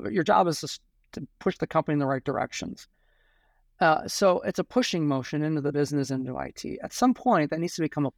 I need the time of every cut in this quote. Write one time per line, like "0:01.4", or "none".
none